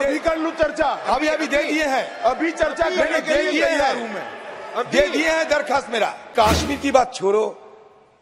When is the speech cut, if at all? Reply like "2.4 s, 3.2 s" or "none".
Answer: 6.3 s

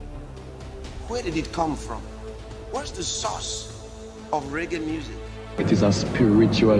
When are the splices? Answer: 5.6 s

